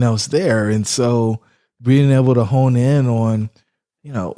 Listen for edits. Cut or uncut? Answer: uncut